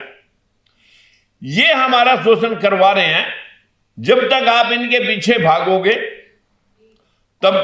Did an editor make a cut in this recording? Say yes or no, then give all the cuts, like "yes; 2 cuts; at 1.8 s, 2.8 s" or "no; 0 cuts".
no; 0 cuts